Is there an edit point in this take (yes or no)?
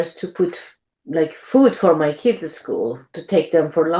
no